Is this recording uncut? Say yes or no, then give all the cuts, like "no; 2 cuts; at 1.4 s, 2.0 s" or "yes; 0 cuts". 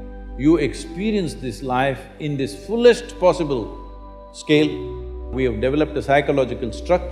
no; 1 cut; at 5.3 s